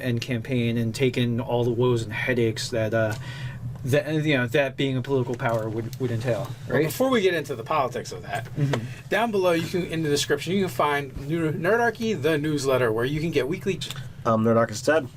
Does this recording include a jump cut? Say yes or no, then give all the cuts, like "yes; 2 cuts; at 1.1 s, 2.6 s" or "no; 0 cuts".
no; 0 cuts